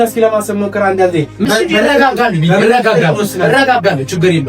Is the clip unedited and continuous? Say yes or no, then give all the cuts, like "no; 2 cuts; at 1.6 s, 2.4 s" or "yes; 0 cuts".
no; 1 cut; at 1.4 s